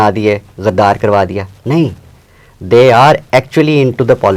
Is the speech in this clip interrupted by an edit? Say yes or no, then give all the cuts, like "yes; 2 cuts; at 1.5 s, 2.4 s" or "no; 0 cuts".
no; 0 cuts